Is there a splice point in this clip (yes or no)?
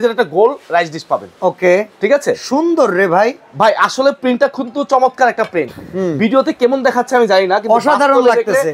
no